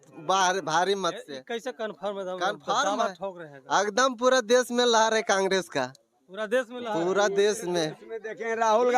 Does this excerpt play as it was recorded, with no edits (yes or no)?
yes